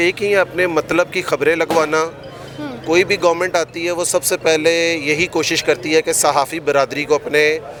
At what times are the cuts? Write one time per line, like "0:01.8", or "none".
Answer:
none